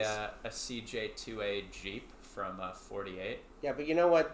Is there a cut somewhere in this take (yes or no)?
no